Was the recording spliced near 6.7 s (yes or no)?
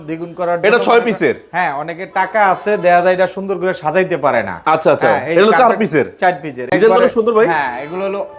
yes